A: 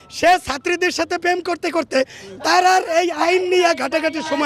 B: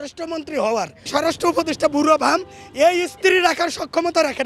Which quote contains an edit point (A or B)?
B